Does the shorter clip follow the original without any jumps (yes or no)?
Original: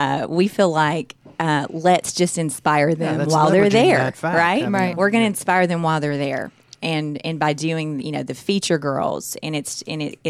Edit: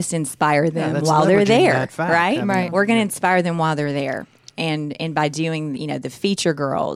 yes